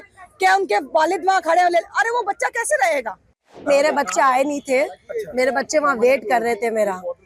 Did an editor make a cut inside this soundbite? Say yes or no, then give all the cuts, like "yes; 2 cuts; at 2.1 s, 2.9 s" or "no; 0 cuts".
yes; 1 cut; at 3.7 s